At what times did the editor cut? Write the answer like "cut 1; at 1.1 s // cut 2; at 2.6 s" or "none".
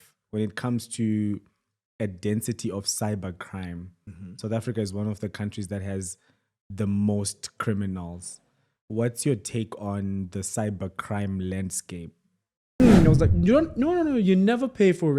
cut 1; at 12.8 s